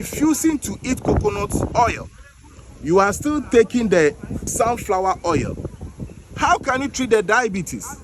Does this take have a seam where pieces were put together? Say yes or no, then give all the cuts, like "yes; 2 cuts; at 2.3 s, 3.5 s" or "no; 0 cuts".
yes; 1 cut; at 4.5 s